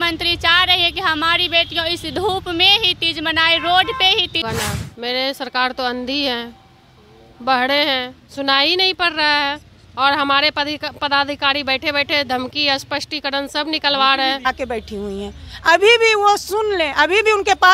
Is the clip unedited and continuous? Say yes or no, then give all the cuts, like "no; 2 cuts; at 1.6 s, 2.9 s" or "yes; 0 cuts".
no; 2 cuts; at 4.4 s, 14.5 s